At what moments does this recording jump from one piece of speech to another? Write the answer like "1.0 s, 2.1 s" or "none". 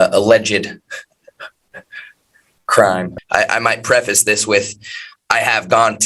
3.1 s